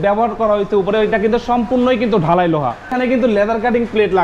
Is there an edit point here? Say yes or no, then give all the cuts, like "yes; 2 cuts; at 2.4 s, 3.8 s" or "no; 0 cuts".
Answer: yes; 1 cut; at 2.9 s